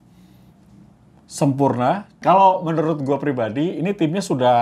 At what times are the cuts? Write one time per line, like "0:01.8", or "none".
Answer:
0:02.2